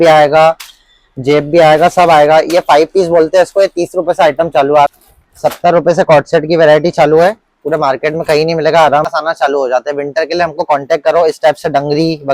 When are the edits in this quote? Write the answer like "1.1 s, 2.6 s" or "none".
4.9 s, 9.1 s